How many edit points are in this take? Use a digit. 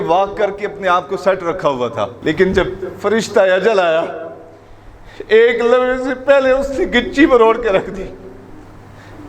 1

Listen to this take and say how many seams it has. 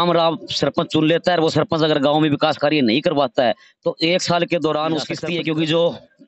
1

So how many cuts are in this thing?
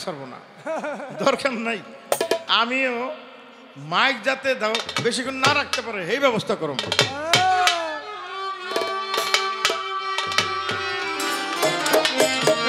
1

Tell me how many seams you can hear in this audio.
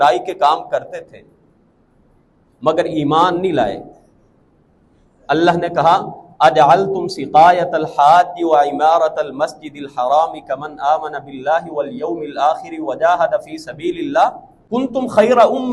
1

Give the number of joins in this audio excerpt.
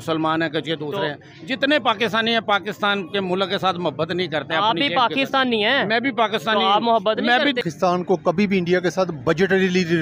1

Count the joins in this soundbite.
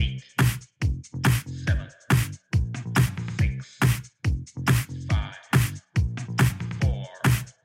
1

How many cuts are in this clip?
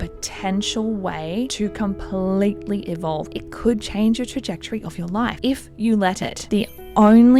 3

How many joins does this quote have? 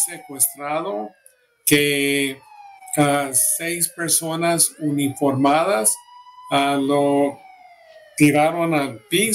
0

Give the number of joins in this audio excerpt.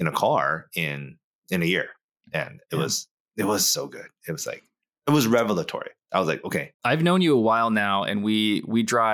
0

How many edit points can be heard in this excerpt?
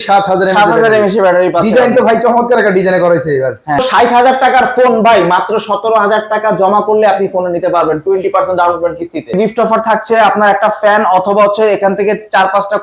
2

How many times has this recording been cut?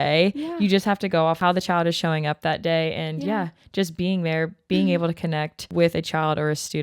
2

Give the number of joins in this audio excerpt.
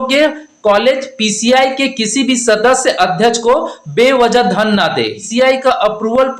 1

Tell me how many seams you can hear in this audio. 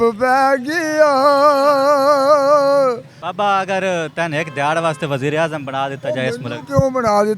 1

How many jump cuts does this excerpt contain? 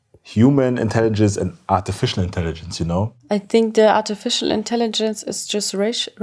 1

